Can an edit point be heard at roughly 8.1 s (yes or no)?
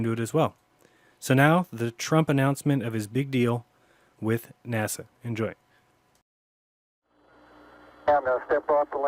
yes